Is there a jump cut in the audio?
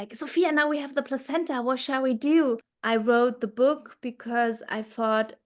yes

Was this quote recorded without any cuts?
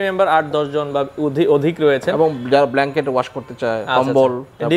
yes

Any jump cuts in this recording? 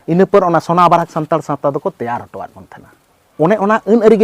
yes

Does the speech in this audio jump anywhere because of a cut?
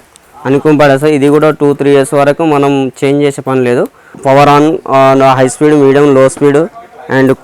yes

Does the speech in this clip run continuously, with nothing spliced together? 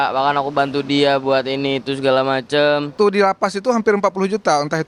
no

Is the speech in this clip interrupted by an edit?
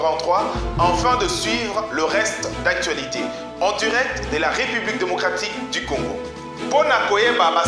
no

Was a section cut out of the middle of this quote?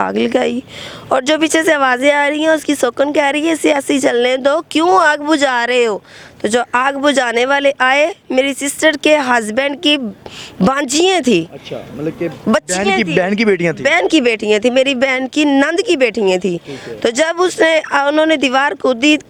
no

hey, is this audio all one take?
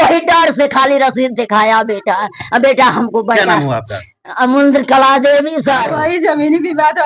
yes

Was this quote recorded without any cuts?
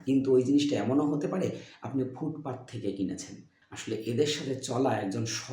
no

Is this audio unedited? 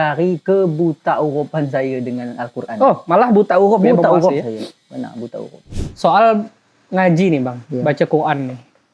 no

